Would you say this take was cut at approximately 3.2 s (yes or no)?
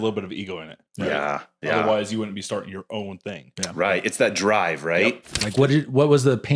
no